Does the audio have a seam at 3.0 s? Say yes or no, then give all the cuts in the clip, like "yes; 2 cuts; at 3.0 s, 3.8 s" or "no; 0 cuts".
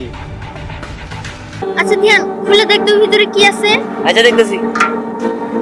no; 1 cut; at 1.6 s